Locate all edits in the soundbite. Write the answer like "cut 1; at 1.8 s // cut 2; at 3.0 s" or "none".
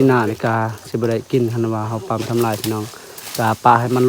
none